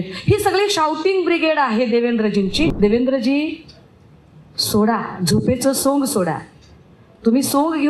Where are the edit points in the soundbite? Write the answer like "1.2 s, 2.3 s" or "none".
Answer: 2.7 s